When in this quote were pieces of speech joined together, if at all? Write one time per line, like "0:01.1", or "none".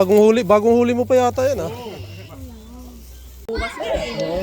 0:03.4